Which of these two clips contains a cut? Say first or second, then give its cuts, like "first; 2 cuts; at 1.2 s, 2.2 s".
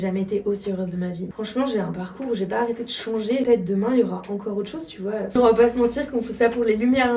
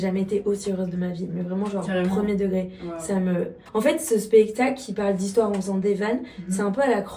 first; 3 cuts; at 1.3 s, 3.5 s, 5.3 s